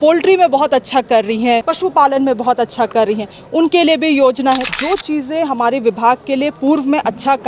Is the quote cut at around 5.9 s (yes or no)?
no